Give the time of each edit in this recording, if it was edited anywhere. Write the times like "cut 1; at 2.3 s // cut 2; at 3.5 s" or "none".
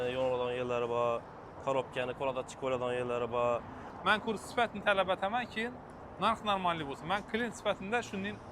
cut 1; at 3.9 s